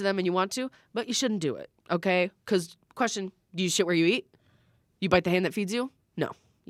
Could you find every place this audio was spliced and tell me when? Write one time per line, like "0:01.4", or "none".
none